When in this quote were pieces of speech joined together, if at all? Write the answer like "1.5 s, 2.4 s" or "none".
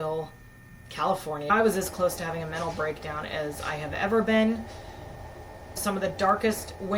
1.4 s, 5.8 s